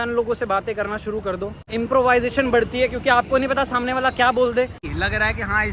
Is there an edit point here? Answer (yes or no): yes